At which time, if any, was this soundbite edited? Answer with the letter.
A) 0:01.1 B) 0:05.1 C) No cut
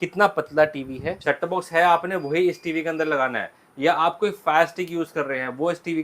A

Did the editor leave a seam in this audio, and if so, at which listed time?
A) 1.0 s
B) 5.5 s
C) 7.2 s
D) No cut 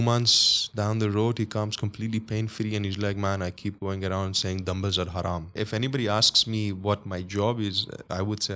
B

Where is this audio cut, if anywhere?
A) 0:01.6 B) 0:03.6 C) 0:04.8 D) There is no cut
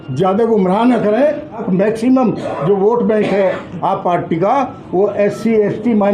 A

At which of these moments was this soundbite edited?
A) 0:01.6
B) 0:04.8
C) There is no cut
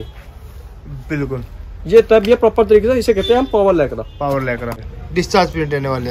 B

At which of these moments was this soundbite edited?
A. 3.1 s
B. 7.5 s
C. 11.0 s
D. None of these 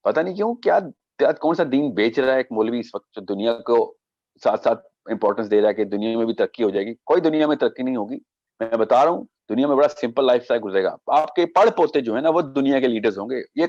D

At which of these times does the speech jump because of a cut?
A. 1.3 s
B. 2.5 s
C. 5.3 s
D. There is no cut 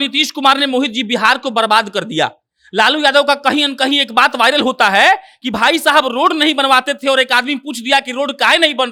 D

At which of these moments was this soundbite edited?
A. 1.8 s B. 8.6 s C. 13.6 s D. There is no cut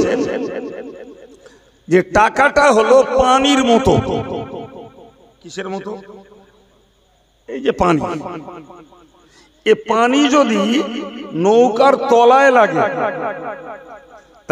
D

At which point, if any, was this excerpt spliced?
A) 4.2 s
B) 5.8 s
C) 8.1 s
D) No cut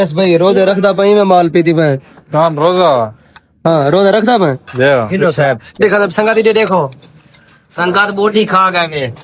B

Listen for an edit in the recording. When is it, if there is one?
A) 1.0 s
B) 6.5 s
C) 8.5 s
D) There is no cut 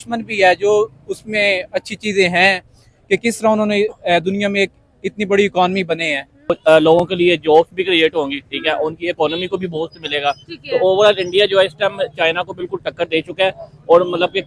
B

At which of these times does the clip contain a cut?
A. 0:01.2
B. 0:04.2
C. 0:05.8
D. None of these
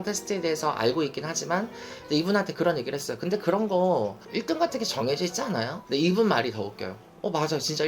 C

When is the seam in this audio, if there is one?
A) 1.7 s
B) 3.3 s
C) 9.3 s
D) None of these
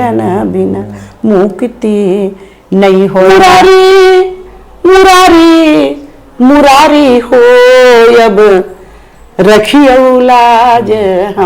B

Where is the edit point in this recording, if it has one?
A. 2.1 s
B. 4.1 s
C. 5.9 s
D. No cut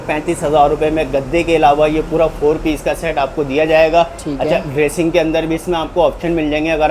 D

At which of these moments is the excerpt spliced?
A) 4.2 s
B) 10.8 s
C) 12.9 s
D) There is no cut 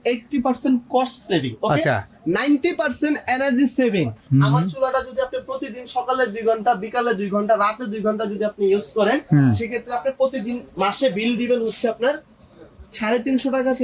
A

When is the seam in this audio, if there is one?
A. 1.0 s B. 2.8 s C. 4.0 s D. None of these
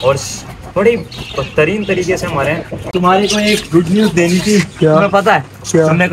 B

